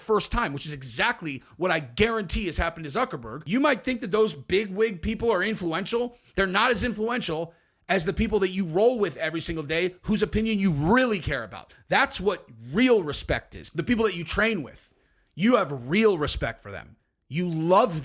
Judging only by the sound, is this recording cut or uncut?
cut